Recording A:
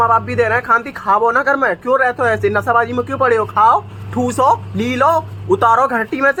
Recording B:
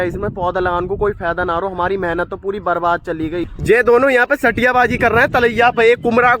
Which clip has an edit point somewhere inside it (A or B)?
B